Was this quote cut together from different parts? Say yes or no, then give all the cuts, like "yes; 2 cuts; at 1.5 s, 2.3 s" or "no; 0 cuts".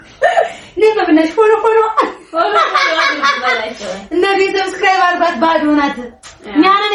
no; 0 cuts